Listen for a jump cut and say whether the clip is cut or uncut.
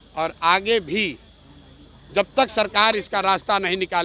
uncut